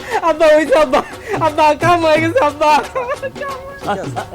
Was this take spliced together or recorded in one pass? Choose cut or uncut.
cut